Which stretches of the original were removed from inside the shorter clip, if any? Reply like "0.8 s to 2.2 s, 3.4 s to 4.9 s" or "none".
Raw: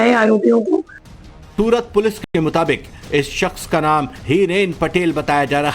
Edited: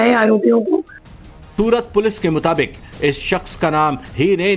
2.2 s to 2.3 s